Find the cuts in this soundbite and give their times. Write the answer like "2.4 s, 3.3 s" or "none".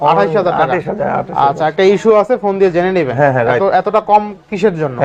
none

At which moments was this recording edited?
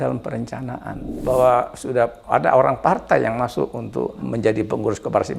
1.1 s, 4.2 s

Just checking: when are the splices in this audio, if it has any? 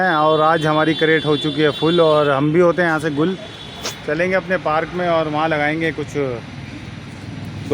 none

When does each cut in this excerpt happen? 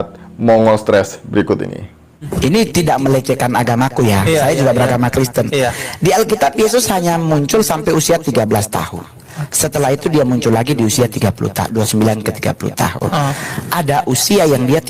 2.3 s

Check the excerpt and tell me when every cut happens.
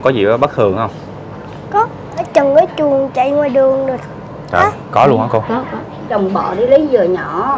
2.3 s, 6.0 s

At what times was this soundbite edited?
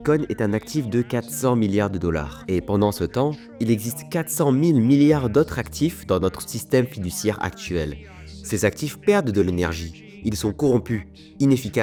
none

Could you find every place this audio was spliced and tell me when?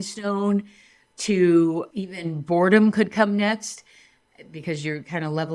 none

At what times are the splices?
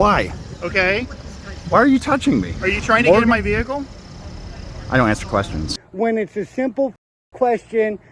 5.8 s

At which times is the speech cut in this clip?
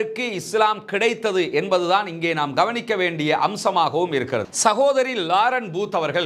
4.7 s

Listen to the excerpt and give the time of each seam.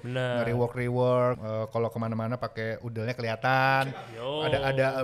1.4 s

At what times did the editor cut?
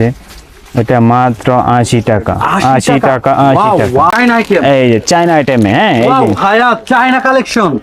4.1 s

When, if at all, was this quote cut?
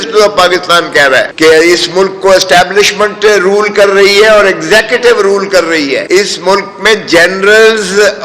1.3 s, 6.0 s

